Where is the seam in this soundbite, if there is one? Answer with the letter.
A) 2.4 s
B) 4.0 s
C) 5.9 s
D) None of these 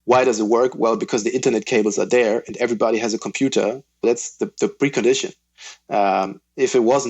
B